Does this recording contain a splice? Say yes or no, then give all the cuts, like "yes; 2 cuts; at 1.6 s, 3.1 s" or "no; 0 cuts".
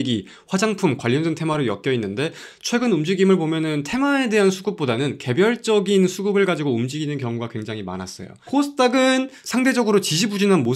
no; 0 cuts